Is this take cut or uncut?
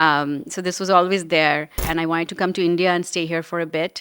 cut